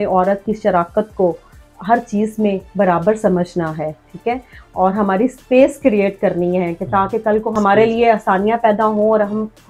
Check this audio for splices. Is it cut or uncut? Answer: uncut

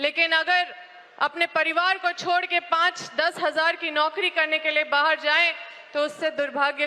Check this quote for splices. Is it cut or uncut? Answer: uncut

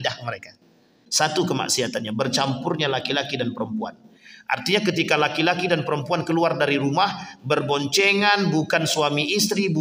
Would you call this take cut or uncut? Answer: cut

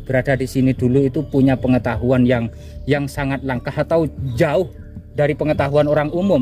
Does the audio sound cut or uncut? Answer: uncut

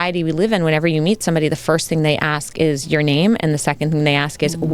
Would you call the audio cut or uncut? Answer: uncut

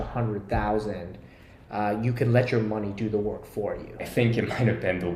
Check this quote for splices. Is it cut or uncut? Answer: cut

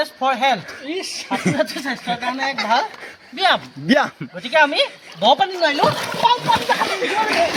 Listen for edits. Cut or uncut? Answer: uncut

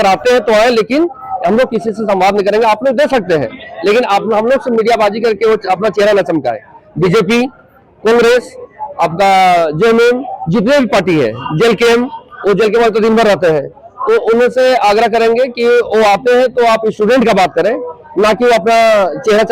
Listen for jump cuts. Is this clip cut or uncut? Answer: uncut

